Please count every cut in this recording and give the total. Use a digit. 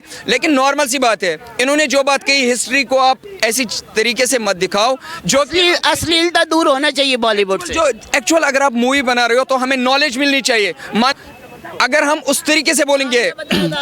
1